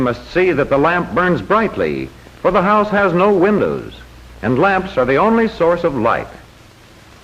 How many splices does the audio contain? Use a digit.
1